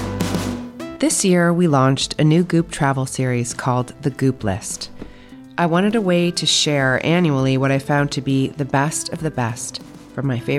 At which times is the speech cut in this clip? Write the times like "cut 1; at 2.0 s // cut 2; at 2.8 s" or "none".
cut 1; at 0.9 s